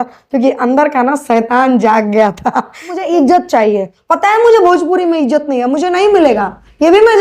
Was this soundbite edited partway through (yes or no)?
yes